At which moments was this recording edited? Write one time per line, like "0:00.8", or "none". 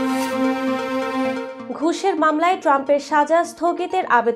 0:01.5